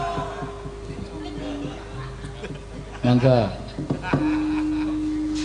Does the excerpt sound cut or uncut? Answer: uncut